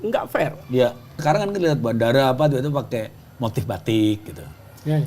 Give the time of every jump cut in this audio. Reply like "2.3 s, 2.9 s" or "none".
1.2 s

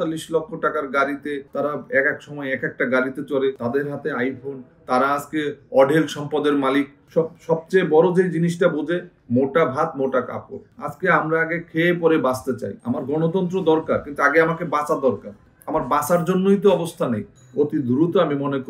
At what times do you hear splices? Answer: 7.0 s, 17.3 s

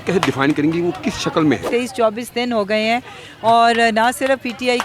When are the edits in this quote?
1.7 s

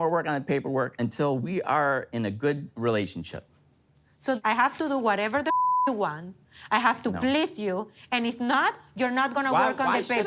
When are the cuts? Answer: 4.4 s

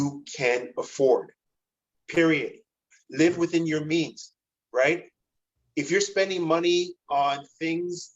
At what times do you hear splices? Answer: 3.0 s

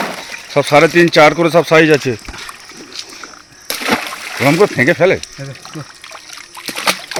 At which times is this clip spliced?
none

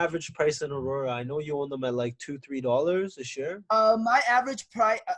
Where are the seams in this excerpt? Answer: none

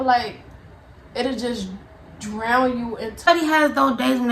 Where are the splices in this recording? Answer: 3.3 s

